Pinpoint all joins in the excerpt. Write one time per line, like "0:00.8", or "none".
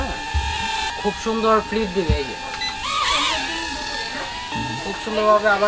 0:00.9
0:04.5